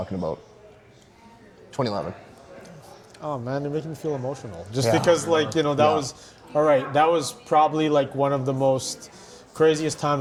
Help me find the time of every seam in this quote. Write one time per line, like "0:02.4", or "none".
none